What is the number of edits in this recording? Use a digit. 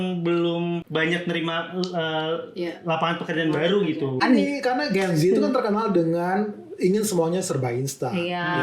2